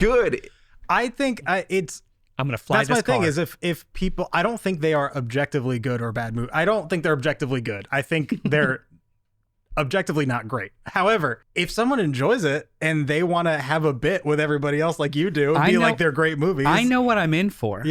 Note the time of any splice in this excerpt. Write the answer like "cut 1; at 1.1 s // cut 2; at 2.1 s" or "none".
cut 1; at 11.4 s